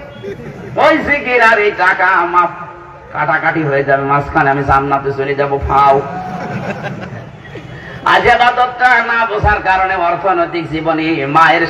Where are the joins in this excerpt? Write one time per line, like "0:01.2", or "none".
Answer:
none

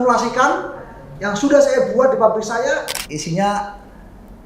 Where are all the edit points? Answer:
0:03.0

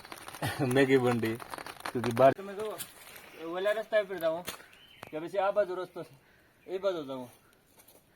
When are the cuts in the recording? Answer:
0:02.3

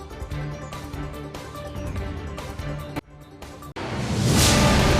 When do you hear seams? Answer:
0:01.1

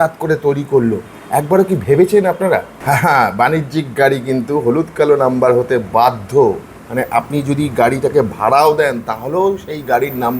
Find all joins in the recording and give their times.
0:02.7

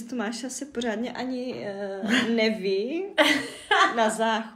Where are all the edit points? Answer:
none

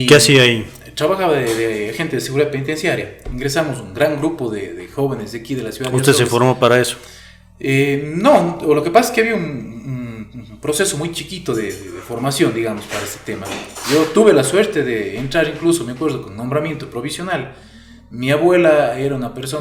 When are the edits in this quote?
none

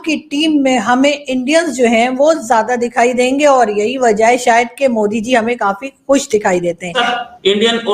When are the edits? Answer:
0:07.0

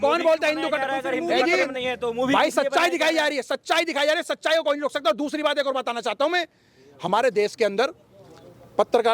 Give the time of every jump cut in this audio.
none

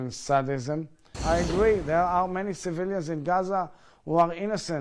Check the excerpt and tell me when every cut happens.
0:01.1

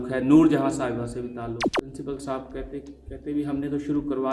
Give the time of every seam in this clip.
0:01.6

